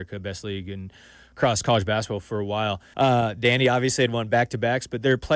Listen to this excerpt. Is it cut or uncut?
cut